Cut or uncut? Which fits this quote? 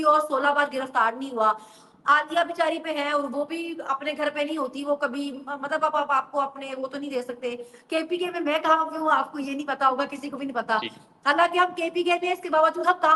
uncut